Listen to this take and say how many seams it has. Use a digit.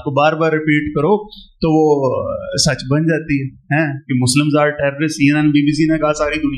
0